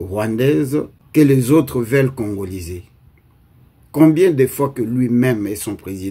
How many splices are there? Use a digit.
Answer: 1